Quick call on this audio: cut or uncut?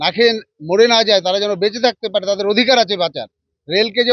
uncut